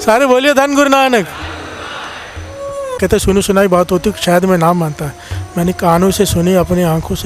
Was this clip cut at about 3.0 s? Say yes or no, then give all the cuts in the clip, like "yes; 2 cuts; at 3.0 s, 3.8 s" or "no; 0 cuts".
yes; 1 cut; at 3.0 s